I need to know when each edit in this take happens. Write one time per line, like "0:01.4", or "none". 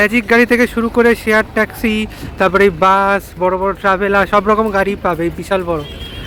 none

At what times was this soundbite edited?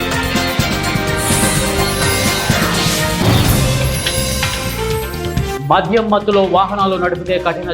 0:05.6

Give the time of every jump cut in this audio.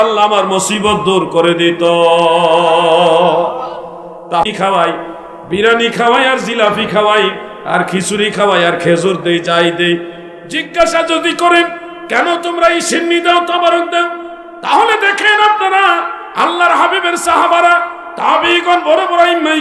0:04.4

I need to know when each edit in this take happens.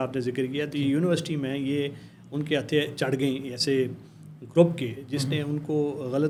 none

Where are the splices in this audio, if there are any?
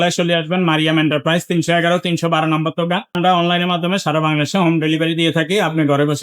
0:03.1

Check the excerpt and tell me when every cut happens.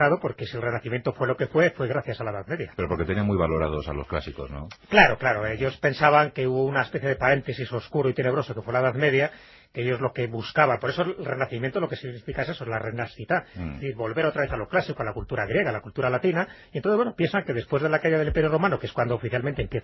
0:02.3

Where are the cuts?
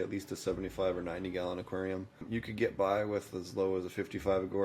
0:02.2

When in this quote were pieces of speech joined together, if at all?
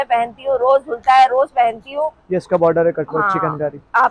none

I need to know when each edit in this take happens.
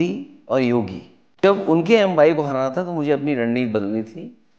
0:01.4

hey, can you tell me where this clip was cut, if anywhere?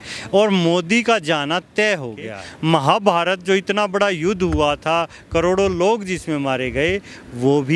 0:02.4

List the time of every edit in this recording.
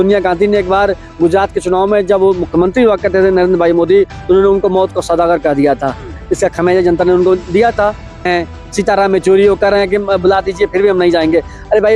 0:08.3

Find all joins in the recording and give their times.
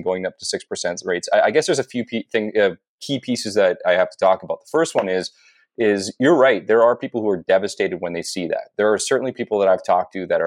none

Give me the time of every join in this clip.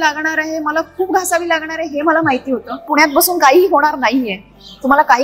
0:02.8

